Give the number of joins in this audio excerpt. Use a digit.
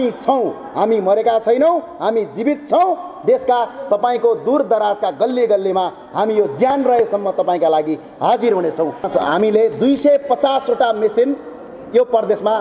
1